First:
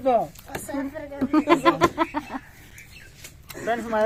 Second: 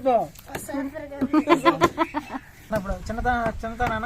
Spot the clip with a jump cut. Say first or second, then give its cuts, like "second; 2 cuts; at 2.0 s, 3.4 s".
second; 1 cut; at 2.7 s